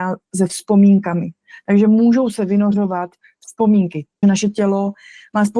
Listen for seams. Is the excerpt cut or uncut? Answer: cut